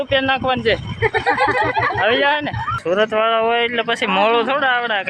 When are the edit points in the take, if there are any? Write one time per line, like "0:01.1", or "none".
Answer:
0:02.7

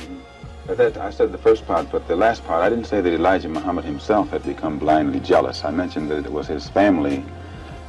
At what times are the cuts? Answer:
none

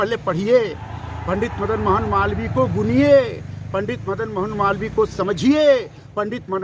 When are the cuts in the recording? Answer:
none

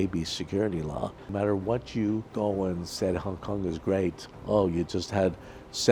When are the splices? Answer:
0:01.3
0:02.3
0:04.3

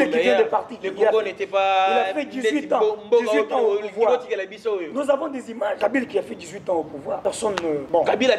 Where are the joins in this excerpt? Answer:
0:05.8
0:07.5

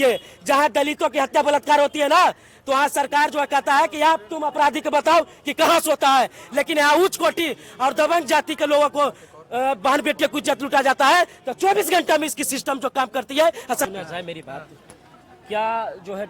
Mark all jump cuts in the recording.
0:13.8

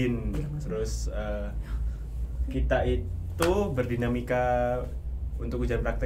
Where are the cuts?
none

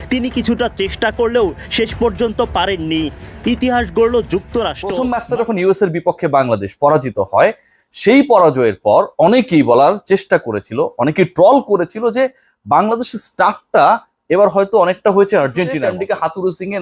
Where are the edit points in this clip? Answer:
0:04.9
0:15.9

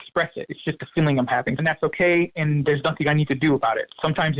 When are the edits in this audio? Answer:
0:01.6

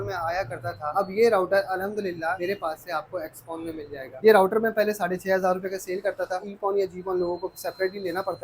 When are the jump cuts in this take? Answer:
0:02.4
0:04.1
0:06.4

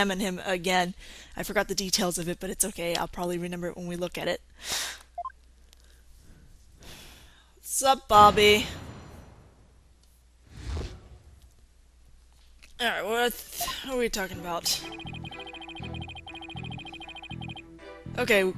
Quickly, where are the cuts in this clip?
none

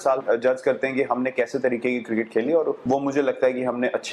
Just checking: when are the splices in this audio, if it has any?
none

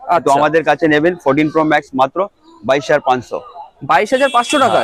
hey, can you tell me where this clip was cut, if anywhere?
none

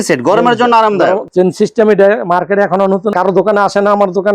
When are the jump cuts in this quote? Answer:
0:01.3

